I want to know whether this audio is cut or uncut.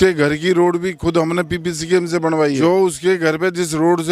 cut